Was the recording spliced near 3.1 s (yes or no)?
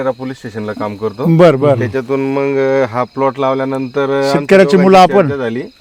no